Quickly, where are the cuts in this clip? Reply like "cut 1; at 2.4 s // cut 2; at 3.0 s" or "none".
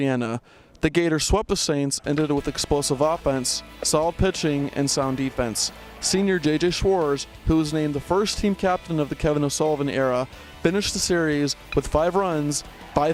none